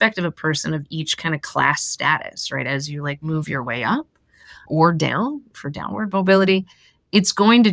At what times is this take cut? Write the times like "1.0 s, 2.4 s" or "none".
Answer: 5.5 s